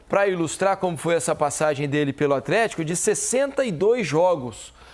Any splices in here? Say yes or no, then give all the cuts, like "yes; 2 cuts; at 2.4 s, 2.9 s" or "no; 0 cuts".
no; 0 cuts